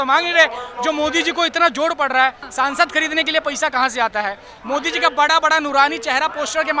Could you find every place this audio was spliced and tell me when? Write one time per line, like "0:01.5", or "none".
0:02.4